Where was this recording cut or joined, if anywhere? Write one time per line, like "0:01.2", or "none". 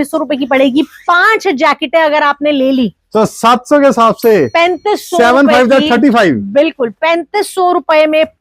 none